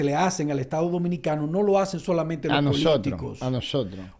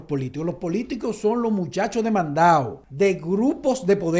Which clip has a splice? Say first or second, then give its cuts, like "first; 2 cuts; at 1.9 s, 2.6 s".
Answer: second; 1 cut; at 2.8 s